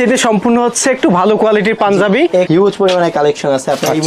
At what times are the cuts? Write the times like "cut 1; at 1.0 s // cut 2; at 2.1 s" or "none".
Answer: cut 1; at 2.5 s